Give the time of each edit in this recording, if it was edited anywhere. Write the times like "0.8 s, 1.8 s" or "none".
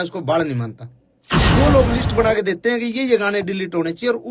1.4 s